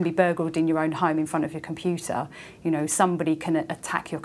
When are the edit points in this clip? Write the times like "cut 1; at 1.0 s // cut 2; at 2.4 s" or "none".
none